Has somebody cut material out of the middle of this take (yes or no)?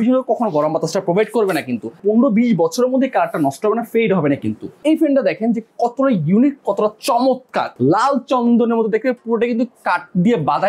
yes